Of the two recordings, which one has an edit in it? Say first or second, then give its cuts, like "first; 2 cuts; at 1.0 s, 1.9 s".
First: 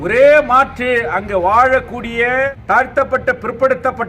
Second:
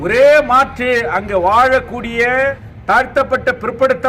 first; 1 cut; at 2.6 s